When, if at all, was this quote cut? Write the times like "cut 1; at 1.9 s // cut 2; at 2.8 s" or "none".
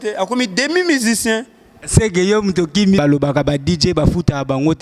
cut 1; at 3.0 s